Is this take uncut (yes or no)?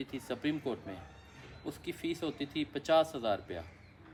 yes